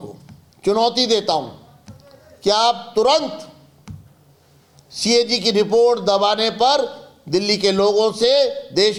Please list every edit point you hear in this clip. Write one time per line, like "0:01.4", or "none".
none